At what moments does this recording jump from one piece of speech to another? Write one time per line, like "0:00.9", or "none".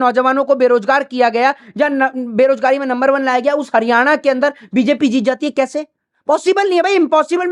none